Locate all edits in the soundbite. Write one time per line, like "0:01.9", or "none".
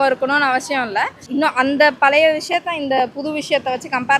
0:01.2